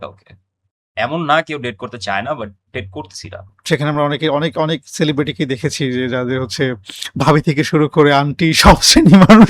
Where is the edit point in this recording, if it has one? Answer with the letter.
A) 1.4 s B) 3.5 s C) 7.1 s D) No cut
B